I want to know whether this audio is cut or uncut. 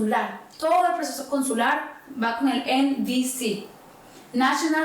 uncut